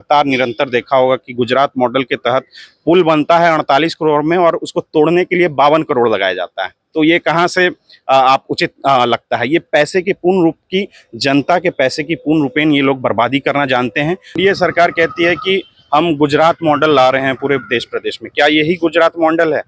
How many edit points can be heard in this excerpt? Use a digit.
1